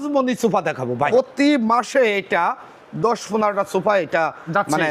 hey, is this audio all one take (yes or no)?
no